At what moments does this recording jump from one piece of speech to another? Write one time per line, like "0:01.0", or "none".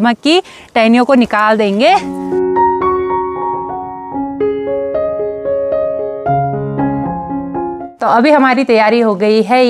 none